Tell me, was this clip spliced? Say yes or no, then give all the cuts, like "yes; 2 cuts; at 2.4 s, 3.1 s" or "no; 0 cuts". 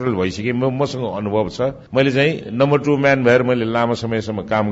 no; 0 cuts